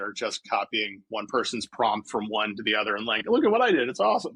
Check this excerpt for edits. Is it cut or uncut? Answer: uncut